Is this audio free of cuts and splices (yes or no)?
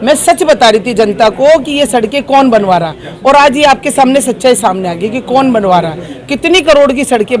yes